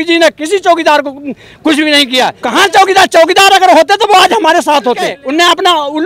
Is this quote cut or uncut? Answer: cut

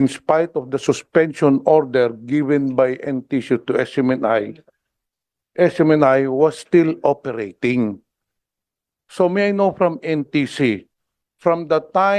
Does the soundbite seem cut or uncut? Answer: uncut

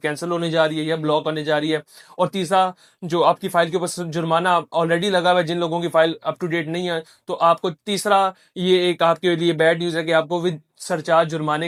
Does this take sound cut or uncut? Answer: uncut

